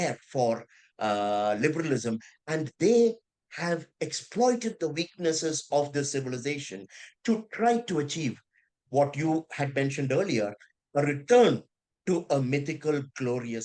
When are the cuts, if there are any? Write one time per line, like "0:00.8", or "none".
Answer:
none